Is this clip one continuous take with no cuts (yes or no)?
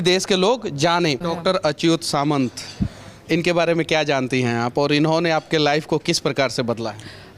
no